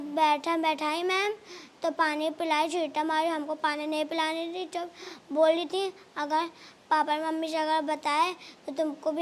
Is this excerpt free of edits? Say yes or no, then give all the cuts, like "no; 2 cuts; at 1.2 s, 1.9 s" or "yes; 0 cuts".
yes; 0 cuts